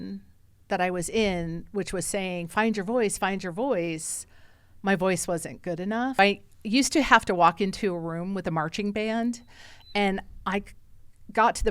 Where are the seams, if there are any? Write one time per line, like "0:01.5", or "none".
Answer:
0:06.2